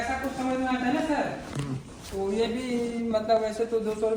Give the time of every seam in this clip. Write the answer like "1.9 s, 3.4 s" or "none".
none